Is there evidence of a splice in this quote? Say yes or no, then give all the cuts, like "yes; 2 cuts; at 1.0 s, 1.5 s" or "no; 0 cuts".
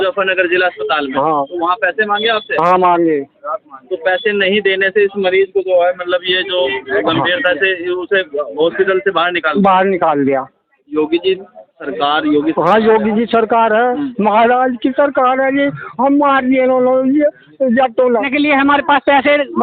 yes; 1 cut; at 18.3 s